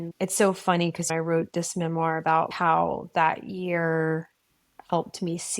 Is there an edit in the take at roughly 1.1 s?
yes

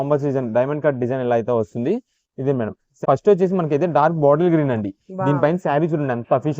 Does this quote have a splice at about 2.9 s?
yes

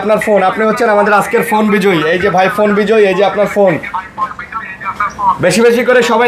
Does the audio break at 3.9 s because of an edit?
no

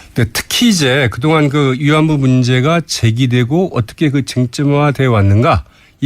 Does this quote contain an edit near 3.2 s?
no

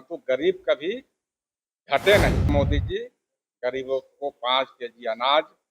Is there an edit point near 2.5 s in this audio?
yes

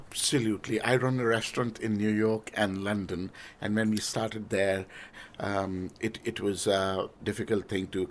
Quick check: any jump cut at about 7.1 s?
yes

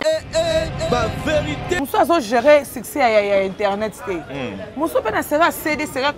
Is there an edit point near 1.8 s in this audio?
yes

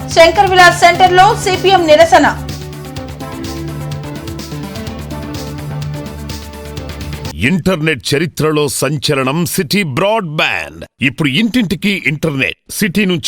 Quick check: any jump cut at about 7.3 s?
yes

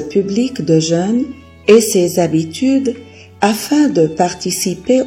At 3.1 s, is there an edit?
no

